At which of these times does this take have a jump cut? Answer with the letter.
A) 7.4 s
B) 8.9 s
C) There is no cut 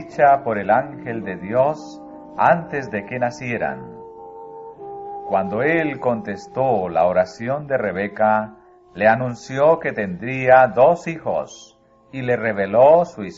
A